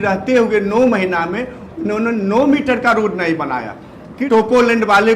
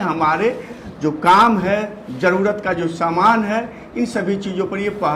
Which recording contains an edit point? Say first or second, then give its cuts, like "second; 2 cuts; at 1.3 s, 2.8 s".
first; 1 cut; at 4.1 s